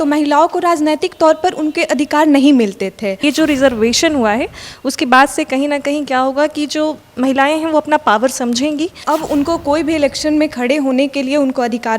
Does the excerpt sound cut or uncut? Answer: cut